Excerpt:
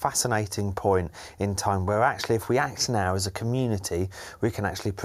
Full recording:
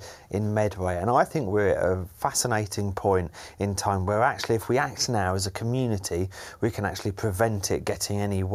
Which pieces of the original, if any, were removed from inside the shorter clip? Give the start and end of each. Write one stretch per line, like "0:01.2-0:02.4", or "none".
none